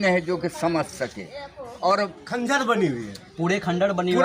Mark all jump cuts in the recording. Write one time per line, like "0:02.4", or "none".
0:02.2